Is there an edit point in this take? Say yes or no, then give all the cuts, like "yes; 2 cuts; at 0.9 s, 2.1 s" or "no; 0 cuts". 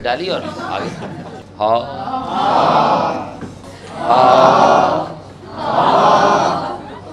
yes; 1 cut; at 1.4 s